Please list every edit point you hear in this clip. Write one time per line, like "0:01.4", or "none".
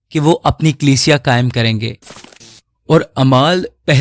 none